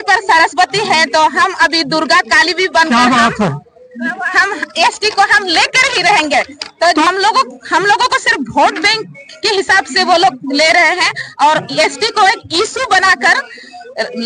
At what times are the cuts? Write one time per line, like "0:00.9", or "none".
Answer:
0:07.1